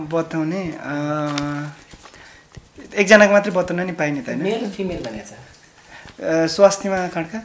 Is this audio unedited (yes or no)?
yes